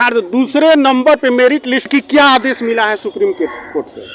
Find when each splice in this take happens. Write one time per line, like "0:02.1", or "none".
0:01.9

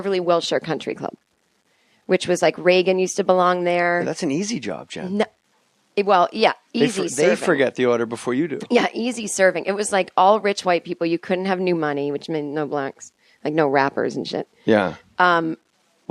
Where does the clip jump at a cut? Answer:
0:13.9

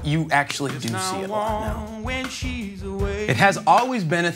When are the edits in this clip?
0:01.0
0:03.2

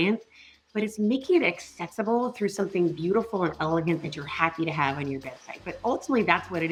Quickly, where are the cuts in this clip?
none

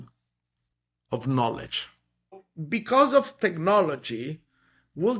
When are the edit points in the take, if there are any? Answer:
0:02.5

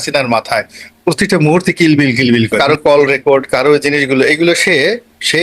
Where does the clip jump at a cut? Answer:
0:02.6

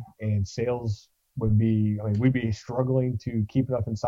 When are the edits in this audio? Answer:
none

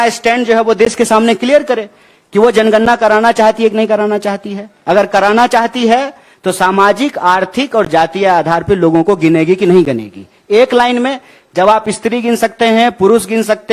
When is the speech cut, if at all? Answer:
none

